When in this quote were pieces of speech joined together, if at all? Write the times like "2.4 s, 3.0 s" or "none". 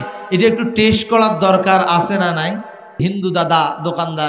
3.0 s